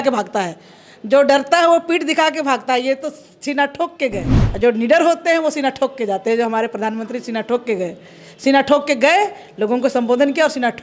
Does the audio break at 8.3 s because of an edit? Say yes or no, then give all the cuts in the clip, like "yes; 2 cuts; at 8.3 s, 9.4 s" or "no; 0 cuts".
no; 1 cut; at 4.4 s